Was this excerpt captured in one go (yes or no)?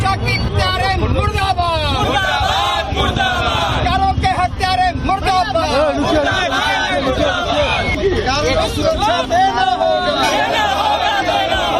yes